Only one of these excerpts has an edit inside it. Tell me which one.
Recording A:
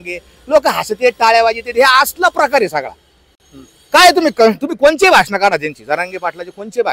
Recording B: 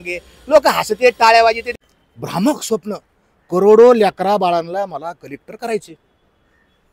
B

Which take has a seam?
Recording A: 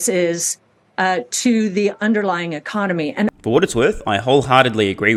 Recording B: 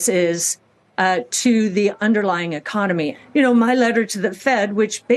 B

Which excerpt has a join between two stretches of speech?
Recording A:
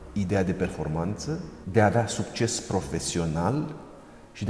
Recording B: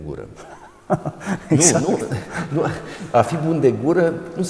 A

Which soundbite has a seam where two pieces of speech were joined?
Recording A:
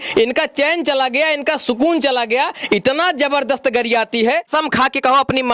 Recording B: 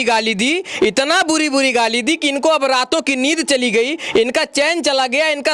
A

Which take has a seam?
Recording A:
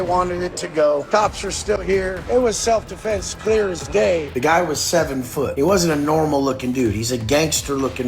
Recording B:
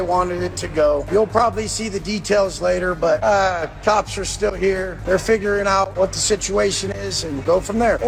A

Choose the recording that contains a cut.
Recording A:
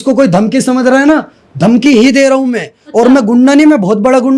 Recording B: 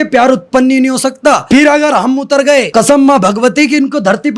B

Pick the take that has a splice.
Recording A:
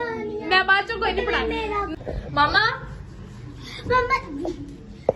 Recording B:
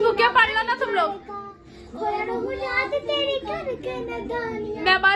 A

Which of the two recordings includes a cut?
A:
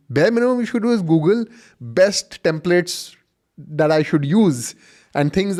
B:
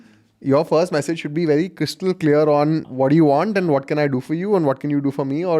B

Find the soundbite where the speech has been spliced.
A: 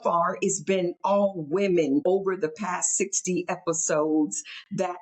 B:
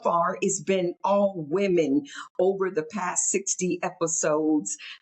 A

